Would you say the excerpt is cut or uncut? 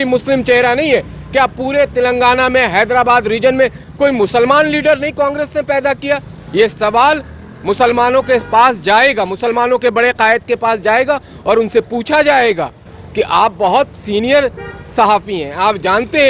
uncut